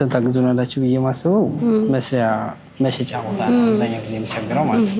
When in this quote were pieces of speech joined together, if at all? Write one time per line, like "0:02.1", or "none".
none